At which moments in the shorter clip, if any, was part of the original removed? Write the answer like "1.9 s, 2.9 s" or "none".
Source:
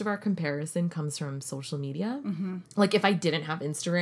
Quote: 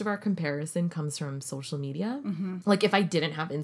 2.6 s